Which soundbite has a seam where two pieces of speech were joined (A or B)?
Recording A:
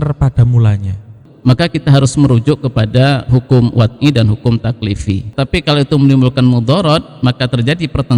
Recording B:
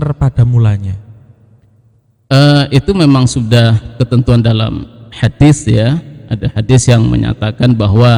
A